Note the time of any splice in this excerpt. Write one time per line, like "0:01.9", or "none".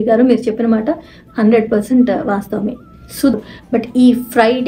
0:03.3